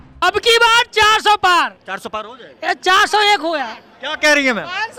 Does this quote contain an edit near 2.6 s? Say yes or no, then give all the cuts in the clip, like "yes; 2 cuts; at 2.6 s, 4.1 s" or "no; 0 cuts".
no; 0 cuts